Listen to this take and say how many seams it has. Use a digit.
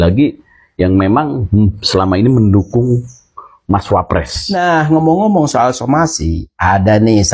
1